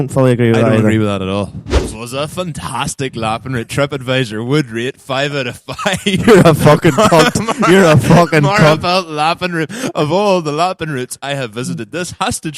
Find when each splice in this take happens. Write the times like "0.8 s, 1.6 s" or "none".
1.9 s